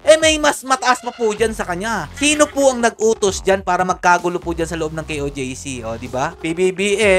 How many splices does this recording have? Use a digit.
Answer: 2